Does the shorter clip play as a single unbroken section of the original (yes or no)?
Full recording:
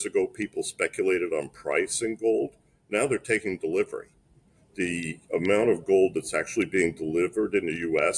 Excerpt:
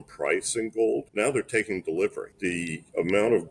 no